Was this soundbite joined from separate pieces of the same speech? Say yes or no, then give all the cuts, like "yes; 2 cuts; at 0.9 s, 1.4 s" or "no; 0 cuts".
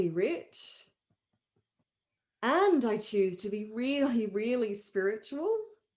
yes; 1 cut; at 1.9 s